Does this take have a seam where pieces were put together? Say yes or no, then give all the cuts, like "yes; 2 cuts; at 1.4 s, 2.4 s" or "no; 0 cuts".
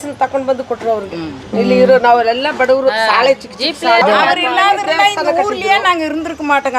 yes; 1 cut; at 4.0 s